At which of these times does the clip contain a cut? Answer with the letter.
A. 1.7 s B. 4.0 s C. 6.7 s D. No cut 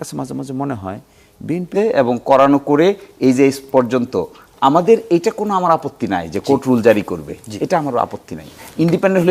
A